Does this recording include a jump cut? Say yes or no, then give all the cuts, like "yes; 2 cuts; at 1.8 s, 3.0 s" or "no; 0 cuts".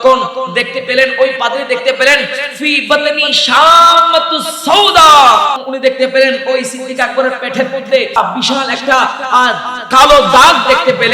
yes; 2 cuts; at 5.6 s, 8.1 s